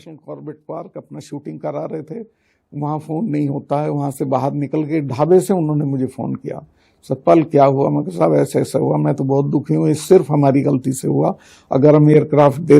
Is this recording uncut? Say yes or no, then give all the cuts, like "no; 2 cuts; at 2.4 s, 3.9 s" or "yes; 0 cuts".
yes; 0 cuts